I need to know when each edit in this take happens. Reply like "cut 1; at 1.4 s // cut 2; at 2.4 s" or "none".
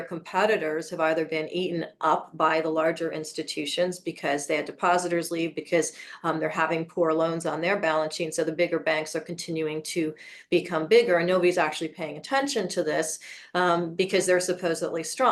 none